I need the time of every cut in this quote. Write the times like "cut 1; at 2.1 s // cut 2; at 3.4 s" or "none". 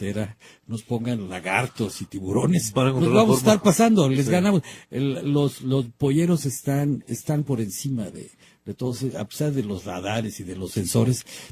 cut 1; at 2.7 s